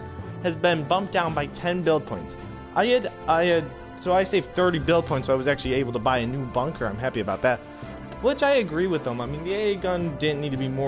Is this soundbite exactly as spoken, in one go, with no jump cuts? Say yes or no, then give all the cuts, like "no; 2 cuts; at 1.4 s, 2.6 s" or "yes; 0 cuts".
no; 1 cut; at 3.1 s